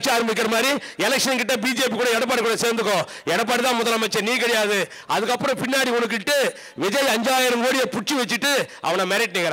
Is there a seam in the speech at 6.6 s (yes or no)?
no